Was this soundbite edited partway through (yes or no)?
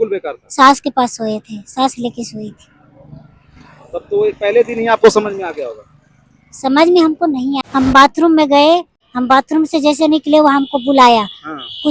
yes